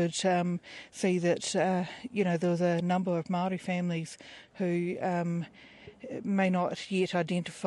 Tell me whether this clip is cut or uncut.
cut